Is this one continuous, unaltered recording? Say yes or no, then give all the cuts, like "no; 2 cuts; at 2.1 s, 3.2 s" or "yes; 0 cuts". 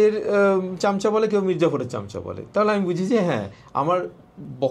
yes; 0 cuts